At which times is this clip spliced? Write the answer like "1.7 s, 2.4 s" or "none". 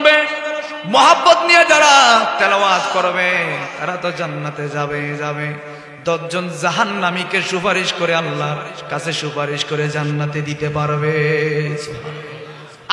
none